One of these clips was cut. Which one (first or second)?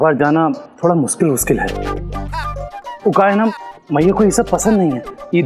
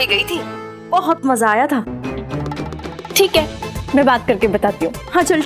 second